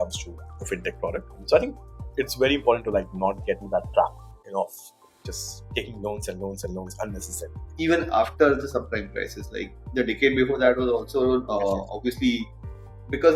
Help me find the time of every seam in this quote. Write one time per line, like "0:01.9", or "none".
0:01.4
0:07.7